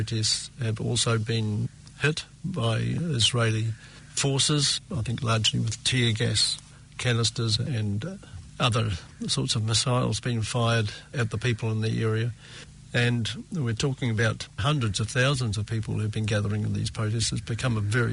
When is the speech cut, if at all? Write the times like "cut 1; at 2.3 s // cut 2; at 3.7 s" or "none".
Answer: cut 1; at 3.0 s // cut 2; at 7.7 s // cut 3; at 14.6 s